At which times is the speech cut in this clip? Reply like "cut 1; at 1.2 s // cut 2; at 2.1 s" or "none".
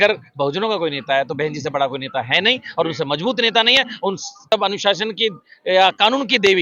cut 1; at 4.5 s